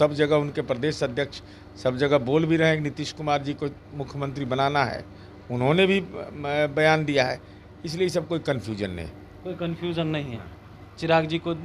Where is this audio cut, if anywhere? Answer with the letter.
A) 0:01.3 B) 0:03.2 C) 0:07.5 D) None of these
D